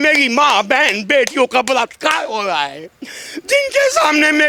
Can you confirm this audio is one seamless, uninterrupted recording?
yes; 0 cuts

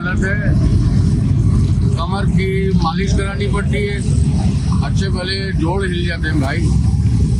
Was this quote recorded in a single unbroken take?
yes; 0 cuts

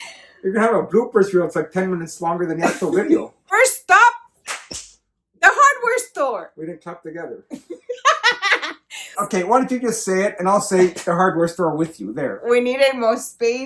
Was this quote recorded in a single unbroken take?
no; 2 cuts; at 3.5 s, 9.2 s

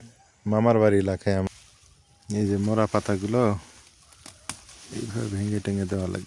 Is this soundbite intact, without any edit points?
no; 1 cut; at 1.5 s

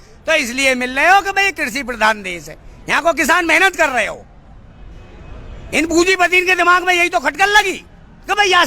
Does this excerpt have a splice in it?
no; 0 cuts

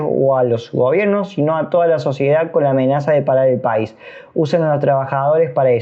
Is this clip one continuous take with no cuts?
yes; 0 cuts

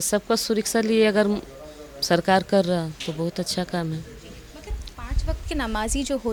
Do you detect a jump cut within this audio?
no; 0 cuts

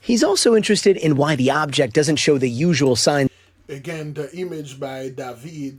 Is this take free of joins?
yes; 0 cuts

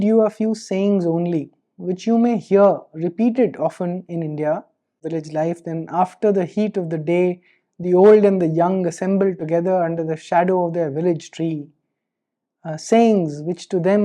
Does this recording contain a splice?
yes; 1 cut; at 5.0 s

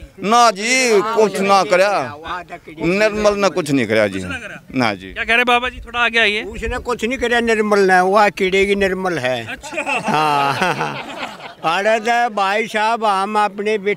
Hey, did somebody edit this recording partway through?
no; 0 cuts

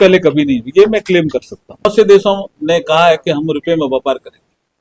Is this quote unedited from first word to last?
no; 1 cut; at 1.8 s

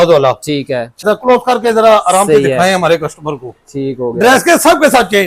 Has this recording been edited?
yes; 1 cut; at 1.0 s

